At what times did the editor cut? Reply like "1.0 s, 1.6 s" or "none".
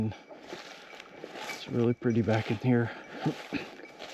none